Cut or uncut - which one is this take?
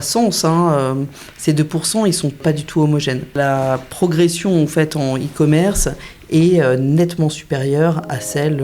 cut